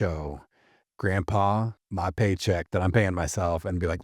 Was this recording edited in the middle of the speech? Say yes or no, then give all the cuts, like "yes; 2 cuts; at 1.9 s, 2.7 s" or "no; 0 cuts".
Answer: yes; 1 cut; at 1.8 s